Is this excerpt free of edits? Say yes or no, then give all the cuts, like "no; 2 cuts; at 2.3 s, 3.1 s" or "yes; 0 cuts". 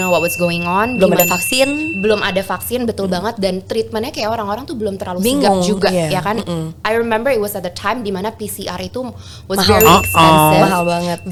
yes; 0 cuts